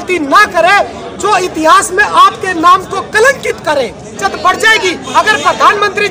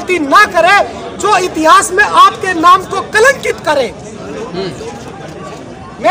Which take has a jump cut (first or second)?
first